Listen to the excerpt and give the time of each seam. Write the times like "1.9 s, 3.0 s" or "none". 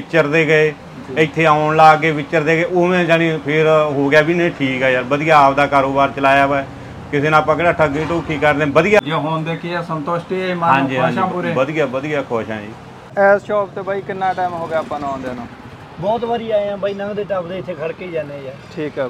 9.0 s, 13.1 s